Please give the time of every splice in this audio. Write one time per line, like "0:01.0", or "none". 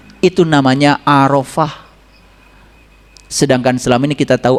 none